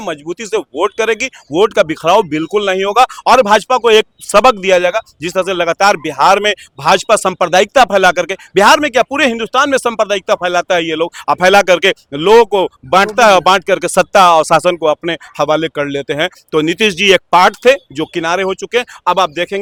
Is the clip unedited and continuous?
yes; 0 cuts

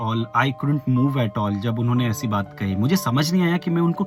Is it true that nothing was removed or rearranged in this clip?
yes; 0 cuts

